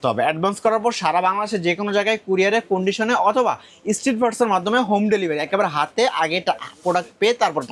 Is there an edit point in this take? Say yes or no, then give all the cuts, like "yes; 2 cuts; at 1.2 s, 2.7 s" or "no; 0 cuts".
no; 0 cuts